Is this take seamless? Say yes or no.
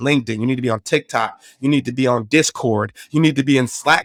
yes